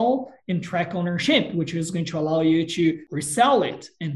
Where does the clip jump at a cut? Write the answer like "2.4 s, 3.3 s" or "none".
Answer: 3.1 s